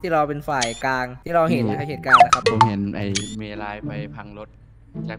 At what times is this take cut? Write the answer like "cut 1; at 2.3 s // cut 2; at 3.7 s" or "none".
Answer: cut 1; at 1.1 s // cut 2; at 2.1 s // cut 3; at 2.7 s

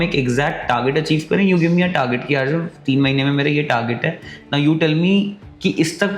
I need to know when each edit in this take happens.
none

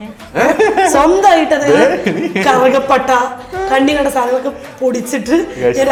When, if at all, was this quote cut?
none

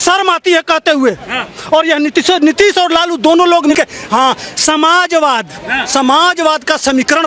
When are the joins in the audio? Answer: cut 1; at 3.7 s

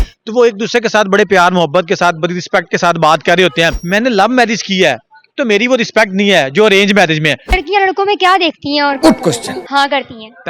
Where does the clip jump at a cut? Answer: cut 1; at 3.8 s // cut 2; at 7.6 s

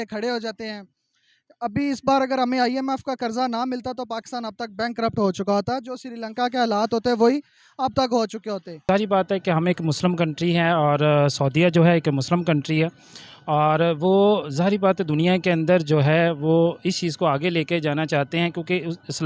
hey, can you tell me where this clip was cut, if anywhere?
cut 1; at 8.8 s

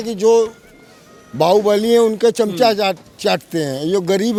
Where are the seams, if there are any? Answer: none

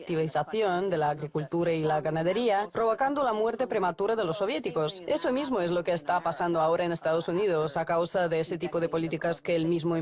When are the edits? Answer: cut 1; at 7.8 s

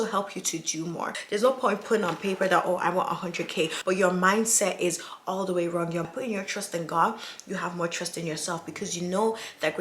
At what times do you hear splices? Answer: cut 1; at 1.2 s // cut 2; at 3.8 s // cut 3; at 6.1 s

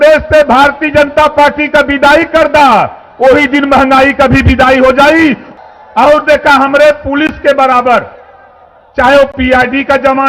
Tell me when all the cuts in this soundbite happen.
cut 1; at 5.5 s

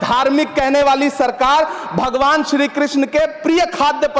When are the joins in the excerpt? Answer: none

